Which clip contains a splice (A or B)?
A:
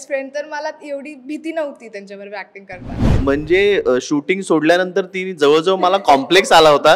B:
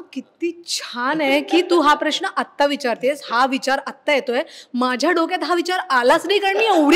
A